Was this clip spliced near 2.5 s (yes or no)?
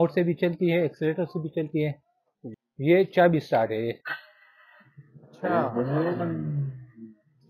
yes